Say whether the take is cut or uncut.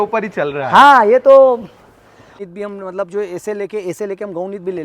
cut